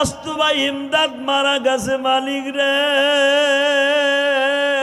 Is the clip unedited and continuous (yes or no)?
yes